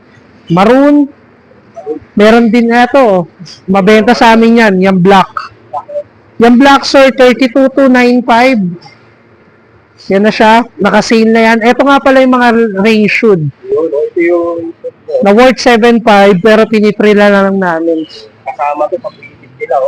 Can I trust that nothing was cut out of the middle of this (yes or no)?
yes